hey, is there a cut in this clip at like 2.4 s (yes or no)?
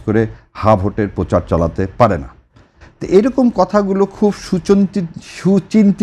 no